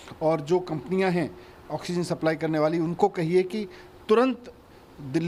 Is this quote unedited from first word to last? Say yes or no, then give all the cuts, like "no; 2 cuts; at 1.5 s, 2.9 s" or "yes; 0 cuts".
yes; 0 cuts